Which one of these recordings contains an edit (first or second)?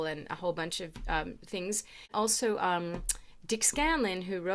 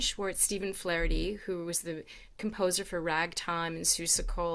first